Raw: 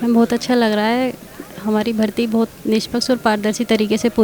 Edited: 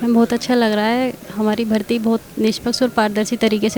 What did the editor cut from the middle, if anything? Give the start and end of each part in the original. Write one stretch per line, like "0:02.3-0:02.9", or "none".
0:01.2-0:01.5